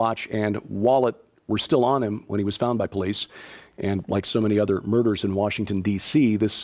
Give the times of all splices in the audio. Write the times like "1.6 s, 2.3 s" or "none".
1.1 s